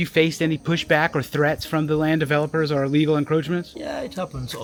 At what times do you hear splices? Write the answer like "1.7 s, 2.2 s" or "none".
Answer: none

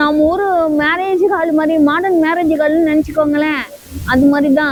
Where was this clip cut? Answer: none

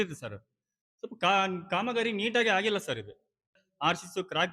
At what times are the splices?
3.6 s

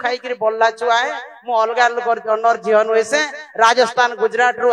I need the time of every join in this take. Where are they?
none

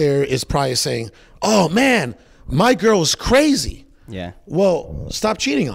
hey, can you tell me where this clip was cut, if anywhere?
none

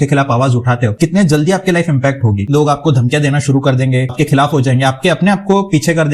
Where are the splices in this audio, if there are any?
0.9 s, 2.5 s, 4.1 s

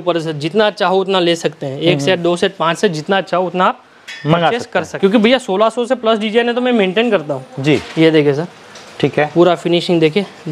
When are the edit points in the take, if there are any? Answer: 4.9 s

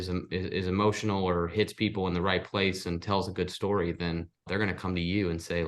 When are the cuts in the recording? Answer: 4.5 s

